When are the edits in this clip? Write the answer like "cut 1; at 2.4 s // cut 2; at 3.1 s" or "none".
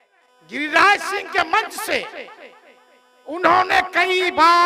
none

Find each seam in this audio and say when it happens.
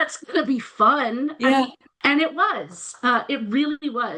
none

